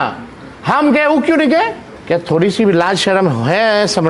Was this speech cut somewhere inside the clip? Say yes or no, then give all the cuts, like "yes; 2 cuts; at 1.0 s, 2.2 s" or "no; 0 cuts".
yes; 1 cut; at 1.9 s